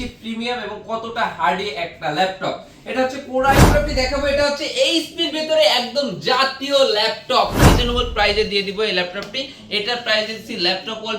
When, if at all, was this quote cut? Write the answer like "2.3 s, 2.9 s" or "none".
3.6 s, 7.6 s